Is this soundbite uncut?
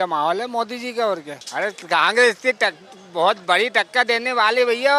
no; 1 cut; at 1.4 s

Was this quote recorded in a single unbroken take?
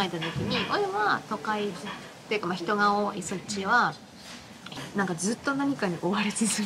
no; 1 cut; at 4.7 s

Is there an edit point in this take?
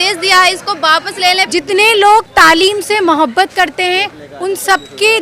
yes; 1 cut; at 1.5 s

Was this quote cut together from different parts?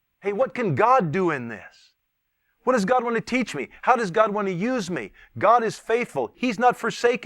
yes; 1 cut; at 6.4 s

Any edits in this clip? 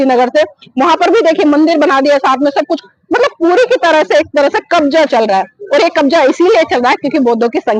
no; 0 cuts

